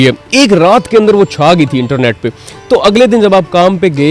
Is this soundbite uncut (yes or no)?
yes